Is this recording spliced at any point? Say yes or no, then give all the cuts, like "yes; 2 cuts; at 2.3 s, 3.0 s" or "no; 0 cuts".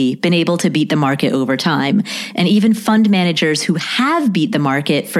no; 0 cuts